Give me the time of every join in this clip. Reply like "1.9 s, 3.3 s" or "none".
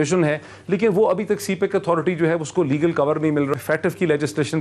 3.5 s